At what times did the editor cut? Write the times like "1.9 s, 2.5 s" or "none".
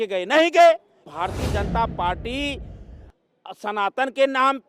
1.0 s